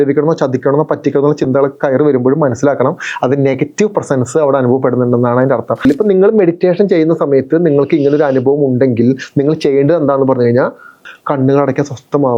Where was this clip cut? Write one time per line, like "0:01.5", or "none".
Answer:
0:05.8
0:11.1